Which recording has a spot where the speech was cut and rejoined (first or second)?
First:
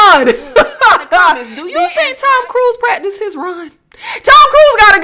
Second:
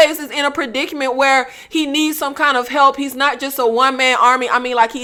first